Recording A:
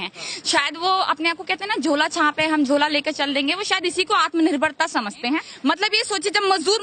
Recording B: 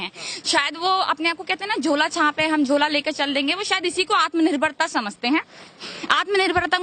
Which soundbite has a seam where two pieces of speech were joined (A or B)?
A